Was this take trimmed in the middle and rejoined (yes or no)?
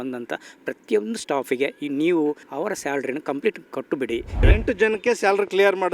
yes